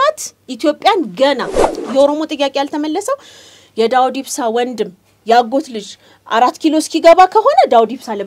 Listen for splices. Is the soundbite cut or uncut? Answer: cut